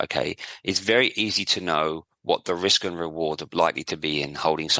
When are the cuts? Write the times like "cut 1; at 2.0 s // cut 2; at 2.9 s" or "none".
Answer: none